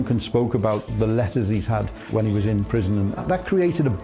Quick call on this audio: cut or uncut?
cut